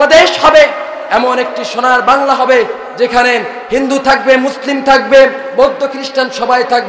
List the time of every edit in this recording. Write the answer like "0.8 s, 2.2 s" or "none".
none